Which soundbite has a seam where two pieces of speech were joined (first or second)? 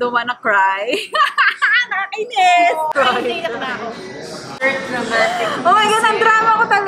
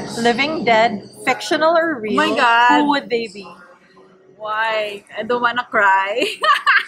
first